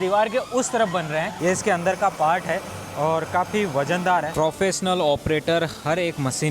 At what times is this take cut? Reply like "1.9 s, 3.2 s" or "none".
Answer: 1.3 s, 4.3 s